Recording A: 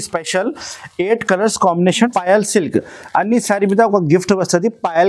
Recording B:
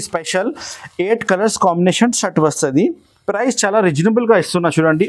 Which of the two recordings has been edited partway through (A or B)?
A